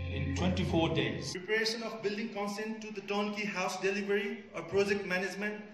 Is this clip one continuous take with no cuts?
no; 1 cut; at 1.3 s

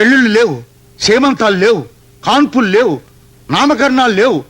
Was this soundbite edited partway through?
no; 0 cuts

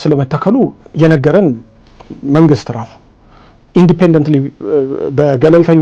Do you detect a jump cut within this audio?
no; 0 cuts

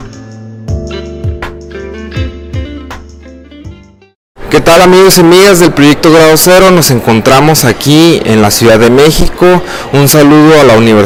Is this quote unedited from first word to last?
yes; 0 cuts

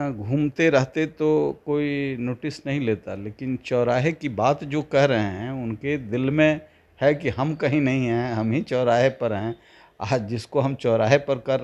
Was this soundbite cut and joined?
no; 0 cuts

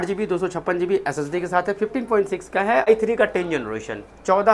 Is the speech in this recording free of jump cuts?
no; 1 cut; at 2.9 s

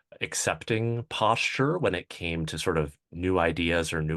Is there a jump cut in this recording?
yes; 1 cut; at 3.1 s

